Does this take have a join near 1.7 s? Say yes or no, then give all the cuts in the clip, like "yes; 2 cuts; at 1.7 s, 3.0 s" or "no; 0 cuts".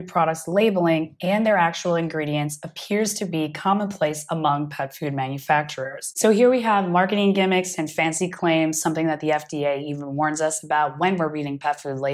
no; 1 cut; at 6.0 s